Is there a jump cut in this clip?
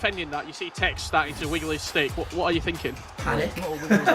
yes; 1 cut; at 3.1 s

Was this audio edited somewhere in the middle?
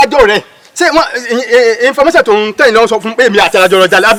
no; 0 cuts

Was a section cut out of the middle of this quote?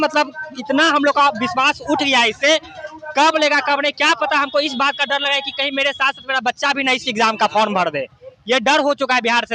no; 0 cuts

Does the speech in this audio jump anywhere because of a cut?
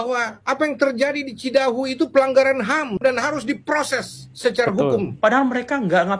yes; 1 cut; at 5.1 s

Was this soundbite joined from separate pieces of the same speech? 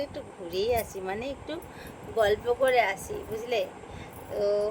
no; 0 cuts

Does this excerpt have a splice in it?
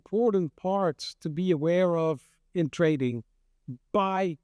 no; 0 cuts

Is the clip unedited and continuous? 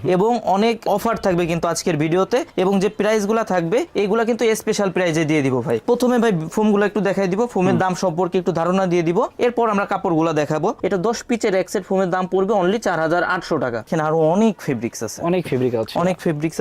no; 3 cuts; at 5.8 s, 10.8 s, 13.9 s

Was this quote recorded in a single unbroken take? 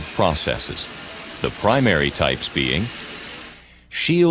yes; 0 cuts

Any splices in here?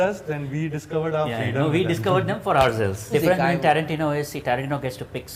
yes; 1 cut; at 3.1 s

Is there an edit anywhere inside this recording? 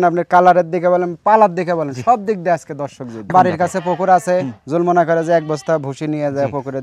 yes; 1 cut; at 3.2 s

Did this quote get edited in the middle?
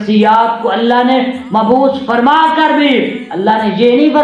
no; 0 cuts

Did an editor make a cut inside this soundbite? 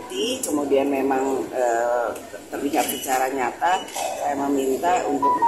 no; 0 cuts

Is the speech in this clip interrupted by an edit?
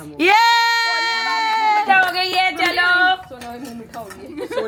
no; 0 cuts

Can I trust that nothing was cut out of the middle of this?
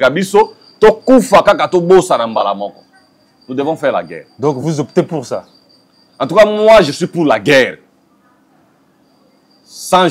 yes; 0 cuts

